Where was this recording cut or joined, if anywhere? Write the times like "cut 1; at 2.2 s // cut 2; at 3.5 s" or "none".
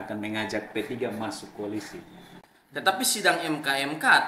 cut 1; at 2.3 s